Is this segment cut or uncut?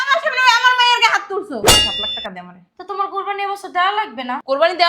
cut